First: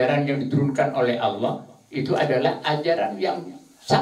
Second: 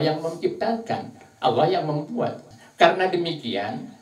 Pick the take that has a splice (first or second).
second